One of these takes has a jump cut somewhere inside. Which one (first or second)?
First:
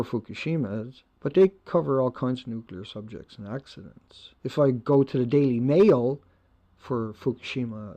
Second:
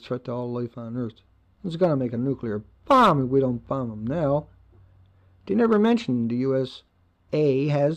first